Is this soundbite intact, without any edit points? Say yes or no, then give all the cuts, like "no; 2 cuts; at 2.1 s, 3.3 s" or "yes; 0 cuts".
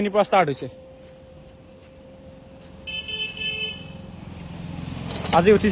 yes; 0 cuts